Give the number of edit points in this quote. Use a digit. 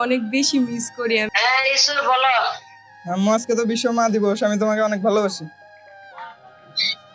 1